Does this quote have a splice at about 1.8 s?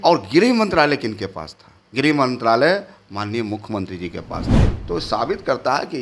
no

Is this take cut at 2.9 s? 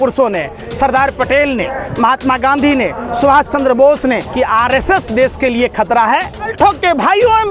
no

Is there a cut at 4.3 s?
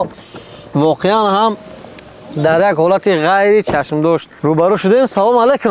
yes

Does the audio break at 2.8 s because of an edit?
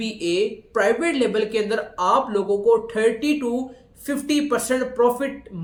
no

